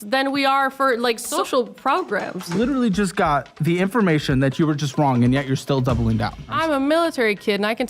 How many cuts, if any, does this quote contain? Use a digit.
3